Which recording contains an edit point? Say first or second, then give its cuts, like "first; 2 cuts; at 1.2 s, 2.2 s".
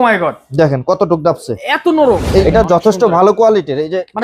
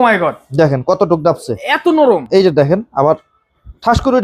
first; 1 cut; at 2.2 s